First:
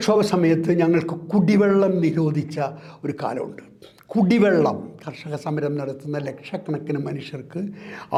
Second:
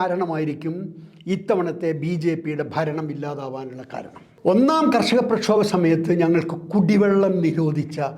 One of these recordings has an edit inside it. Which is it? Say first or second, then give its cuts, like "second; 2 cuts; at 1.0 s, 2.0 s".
second; 1 cut; at 4.2 s